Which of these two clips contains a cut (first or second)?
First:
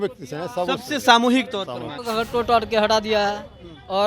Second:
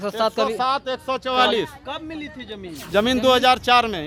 first